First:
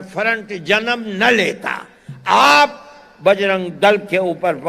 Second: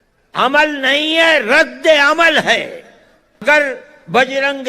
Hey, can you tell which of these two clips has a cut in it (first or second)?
second